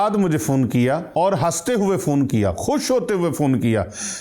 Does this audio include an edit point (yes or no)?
yes